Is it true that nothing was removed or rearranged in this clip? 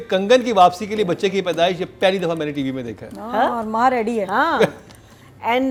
yes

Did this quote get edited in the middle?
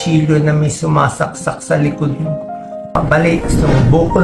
yes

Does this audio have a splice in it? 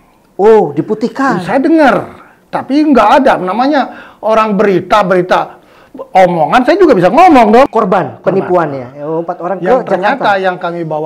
yes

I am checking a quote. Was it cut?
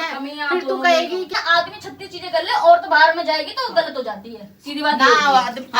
yes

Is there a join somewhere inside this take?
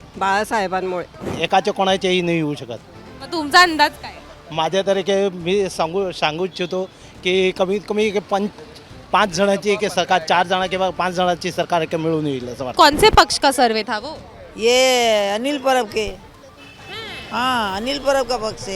yes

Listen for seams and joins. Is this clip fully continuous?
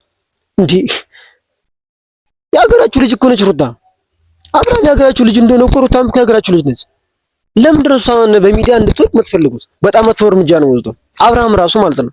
no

